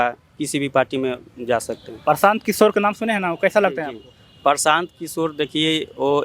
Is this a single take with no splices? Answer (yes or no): yes